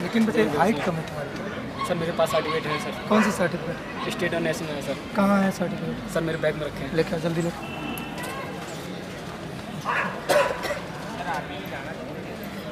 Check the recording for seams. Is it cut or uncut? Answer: uncut